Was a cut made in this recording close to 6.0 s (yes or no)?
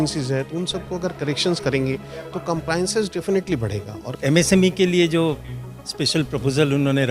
no